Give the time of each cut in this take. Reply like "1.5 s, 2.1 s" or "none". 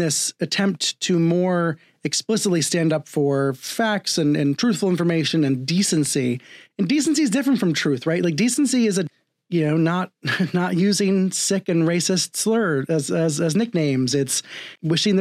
none